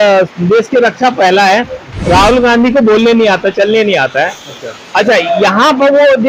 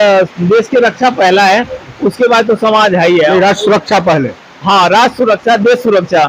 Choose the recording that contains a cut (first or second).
first